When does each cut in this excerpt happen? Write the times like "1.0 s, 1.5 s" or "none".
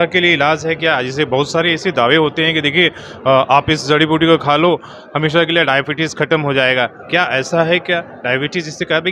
none